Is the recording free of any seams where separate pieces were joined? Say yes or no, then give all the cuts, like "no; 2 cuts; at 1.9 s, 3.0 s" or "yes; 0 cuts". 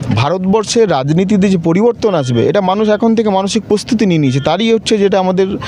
yes; 0 cuts